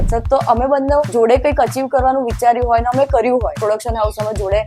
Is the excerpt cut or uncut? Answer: cut